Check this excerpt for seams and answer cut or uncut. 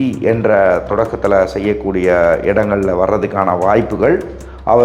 uncut